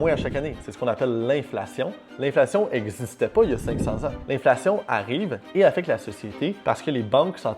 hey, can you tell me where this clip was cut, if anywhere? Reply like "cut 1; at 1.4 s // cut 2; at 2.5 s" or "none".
cut 1; at 2.1 s